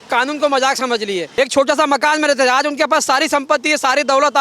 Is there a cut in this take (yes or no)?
yes